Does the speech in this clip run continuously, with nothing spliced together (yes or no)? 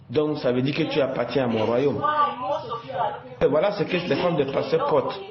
no